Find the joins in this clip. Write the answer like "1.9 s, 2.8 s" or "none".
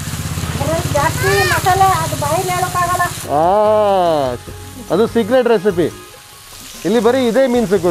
none

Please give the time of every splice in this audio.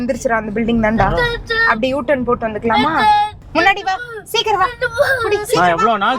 3.4 s

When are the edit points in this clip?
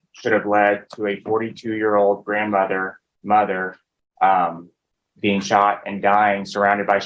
none

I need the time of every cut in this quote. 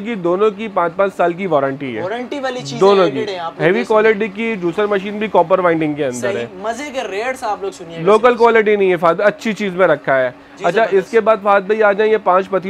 none

